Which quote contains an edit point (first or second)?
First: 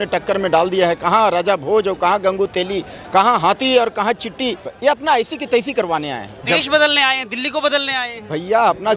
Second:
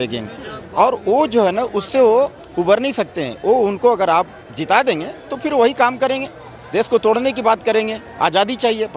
first